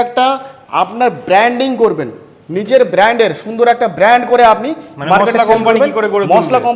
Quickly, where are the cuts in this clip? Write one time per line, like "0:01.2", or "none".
none

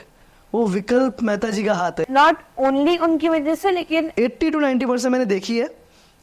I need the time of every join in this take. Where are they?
0:02.0
0:04.1

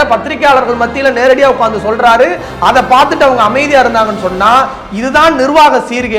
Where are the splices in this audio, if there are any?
none

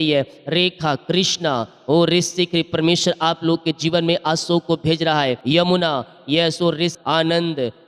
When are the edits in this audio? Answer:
0:05.4
0:07.0

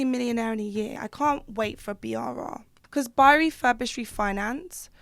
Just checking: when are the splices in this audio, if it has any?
0:01.0
0:02.7

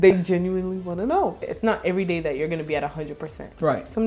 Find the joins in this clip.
0:01.5

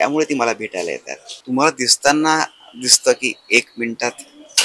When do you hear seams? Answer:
0:01.3

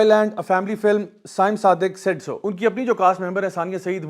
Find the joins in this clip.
0:02.5

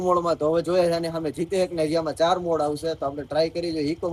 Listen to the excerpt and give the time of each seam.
none

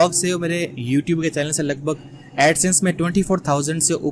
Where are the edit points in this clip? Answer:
none

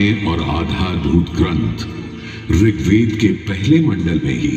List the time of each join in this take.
none

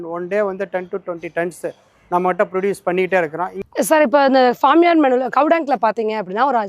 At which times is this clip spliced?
0:03.6

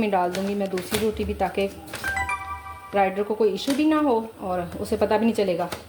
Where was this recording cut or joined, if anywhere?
0:04.4

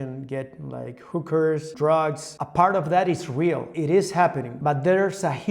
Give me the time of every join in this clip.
0:02.2
0:03.7
0:04.5

